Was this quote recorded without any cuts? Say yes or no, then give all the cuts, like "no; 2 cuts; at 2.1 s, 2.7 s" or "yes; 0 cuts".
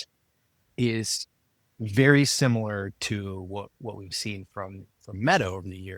yes; 0 cuts